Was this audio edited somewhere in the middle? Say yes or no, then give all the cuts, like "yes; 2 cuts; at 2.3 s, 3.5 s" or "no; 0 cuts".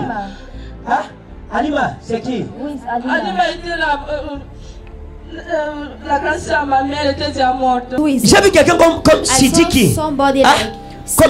yes; 1 cut; at 7.9 s